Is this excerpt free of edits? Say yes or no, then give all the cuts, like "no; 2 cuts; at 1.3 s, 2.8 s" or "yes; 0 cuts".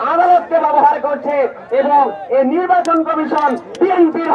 yes; 0 cuts